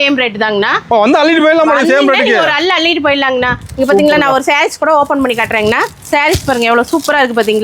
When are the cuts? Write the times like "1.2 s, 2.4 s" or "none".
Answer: none